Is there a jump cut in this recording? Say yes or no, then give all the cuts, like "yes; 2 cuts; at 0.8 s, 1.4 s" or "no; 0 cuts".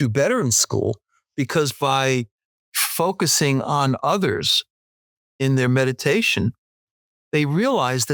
no; 0 cuts